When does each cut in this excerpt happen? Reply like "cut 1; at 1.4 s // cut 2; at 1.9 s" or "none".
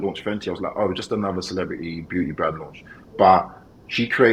none